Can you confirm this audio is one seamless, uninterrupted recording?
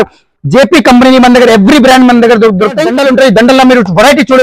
no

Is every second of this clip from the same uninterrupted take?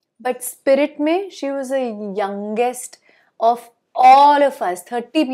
yes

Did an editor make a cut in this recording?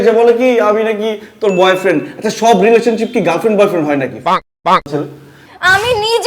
no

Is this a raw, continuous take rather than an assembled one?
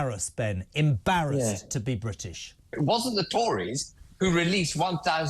no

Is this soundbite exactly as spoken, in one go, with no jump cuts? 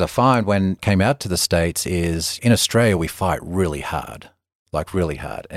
no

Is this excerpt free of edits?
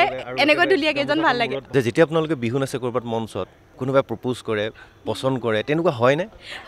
no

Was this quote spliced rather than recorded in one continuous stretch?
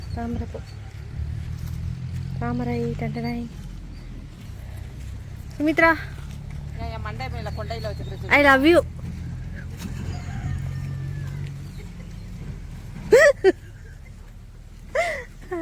no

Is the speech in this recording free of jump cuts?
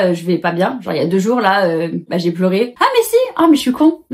no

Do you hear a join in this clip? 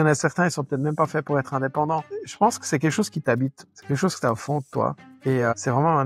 yes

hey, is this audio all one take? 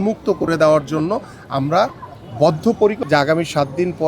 no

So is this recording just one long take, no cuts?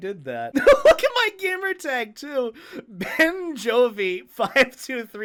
yes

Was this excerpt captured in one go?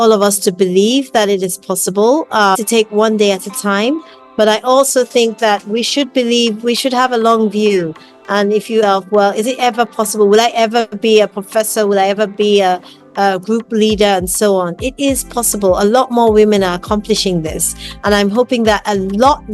no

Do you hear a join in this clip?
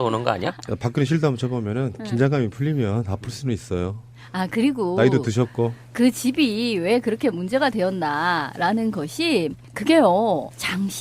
no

